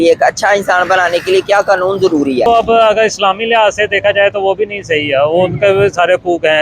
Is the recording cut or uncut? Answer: cut